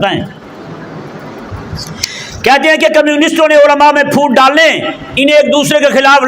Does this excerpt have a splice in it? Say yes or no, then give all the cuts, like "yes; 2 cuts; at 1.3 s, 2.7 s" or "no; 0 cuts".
yes; 1 cut; at 1.5 s